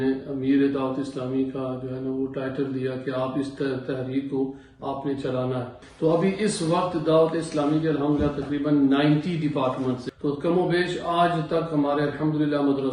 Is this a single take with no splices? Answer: no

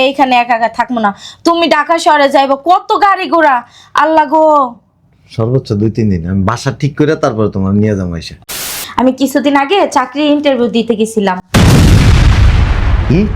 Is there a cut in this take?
yes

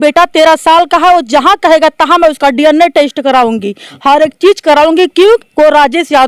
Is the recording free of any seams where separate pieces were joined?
yes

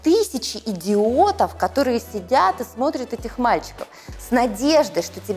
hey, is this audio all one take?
no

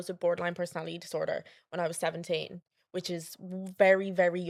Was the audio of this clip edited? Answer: no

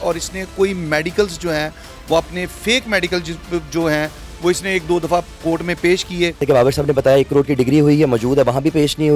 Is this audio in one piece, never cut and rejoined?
no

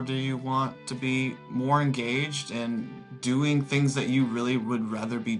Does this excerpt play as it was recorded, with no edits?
yes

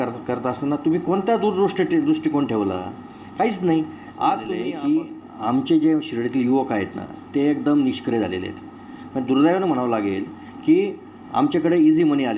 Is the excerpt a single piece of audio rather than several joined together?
no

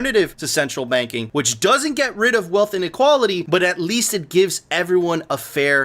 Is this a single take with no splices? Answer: no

